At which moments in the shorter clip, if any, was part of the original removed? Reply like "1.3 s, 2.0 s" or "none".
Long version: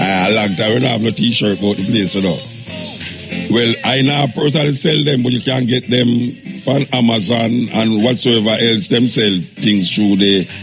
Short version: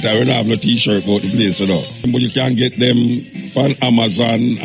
2.0 s